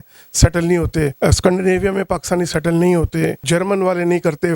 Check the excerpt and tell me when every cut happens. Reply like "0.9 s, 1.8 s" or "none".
3.4 s